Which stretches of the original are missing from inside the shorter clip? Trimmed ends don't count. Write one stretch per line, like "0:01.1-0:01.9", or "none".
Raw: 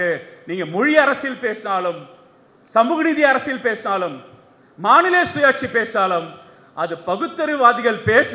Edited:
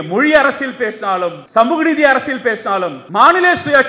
0:02.0-0:02.6
0:04.2-0:04.7